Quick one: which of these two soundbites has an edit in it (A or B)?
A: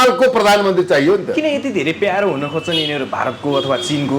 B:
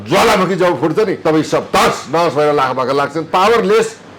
B